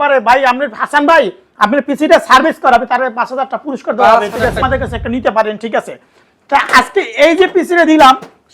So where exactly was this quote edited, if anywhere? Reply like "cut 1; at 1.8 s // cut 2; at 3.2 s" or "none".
cut 1; at 4.6 s

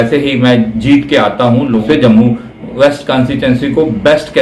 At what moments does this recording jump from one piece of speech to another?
cut 1; at 1.8 s

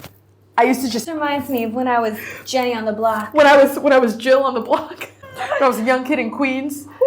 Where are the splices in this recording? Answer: cut 1; at 1.1 s // cut 2; at 5.2 s

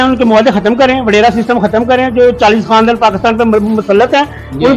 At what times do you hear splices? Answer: none

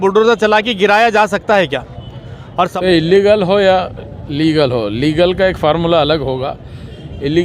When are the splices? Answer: cut 1; at 2.8 s

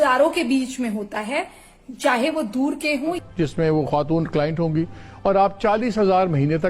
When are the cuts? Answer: cut 1; at 3.2 s

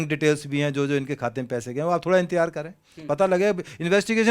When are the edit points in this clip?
none

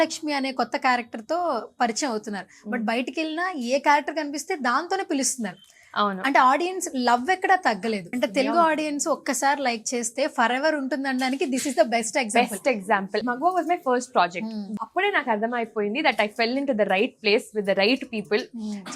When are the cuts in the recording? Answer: cut 1; at 8.1 s // cut 2; at 13.2 s // cut 3; at 14.7 s

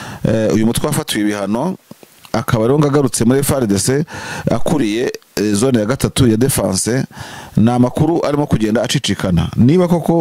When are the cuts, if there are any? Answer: none

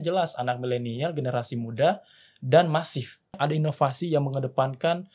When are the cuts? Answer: cut 1; at 3.4 s

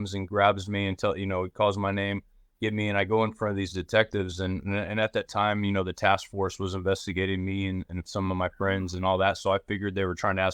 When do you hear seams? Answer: none

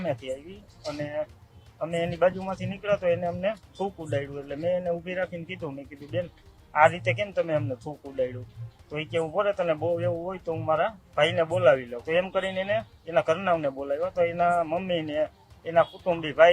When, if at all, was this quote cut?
cut 1; at 11.9 s

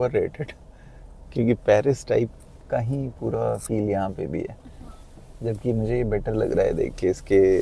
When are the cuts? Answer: none

